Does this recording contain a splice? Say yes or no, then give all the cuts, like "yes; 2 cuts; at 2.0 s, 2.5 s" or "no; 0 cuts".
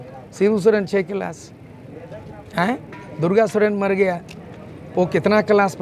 no; 0 cuts